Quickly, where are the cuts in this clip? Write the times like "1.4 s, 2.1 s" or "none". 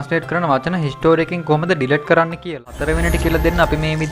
2.5 s